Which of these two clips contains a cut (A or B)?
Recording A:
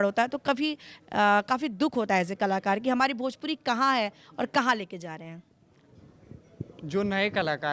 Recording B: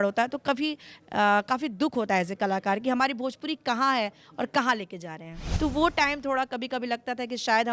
B